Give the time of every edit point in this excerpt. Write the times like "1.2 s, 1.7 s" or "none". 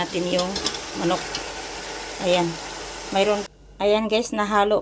3.4 s